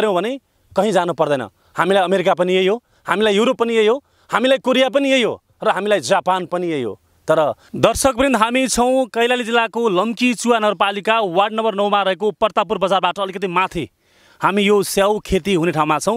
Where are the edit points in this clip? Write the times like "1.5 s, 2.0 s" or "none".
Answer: 7.7 s

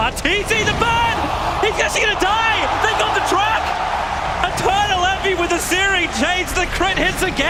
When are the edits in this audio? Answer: none

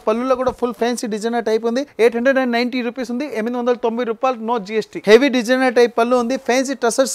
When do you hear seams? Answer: 1.9 s, 4.9 s

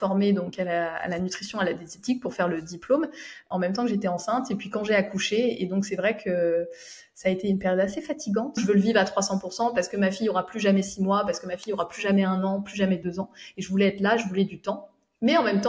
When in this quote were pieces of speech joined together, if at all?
3.4 s, 8.6 s

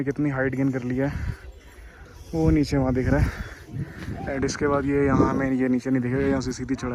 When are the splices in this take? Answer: none

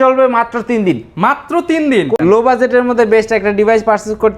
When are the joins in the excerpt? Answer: 2.1 s

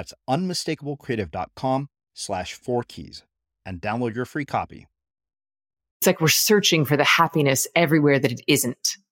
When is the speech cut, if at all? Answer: 6.0 s

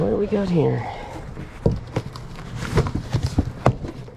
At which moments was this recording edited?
none

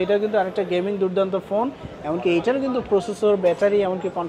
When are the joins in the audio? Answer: none

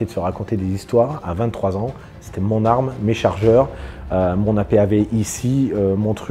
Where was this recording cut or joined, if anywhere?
none

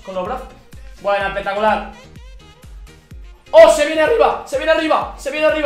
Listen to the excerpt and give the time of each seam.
2.0 s, 3.5 s

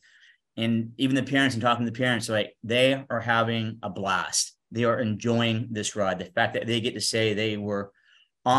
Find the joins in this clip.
none

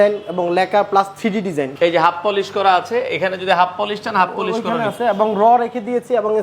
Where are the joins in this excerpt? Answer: 1.7 s

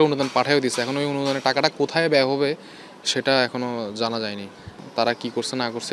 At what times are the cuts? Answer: 4.8 s

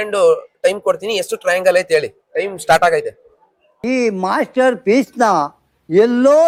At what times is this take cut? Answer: none

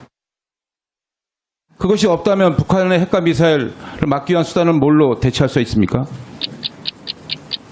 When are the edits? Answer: 4.2 s

